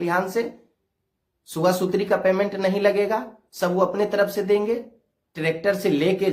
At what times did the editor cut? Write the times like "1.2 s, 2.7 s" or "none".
none